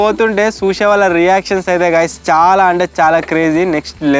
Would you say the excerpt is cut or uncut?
uncut